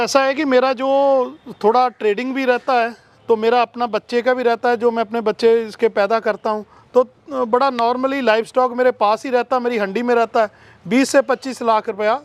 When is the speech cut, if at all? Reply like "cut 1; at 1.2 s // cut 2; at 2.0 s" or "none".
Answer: none